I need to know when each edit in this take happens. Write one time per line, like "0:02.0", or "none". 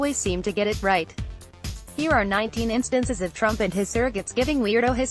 none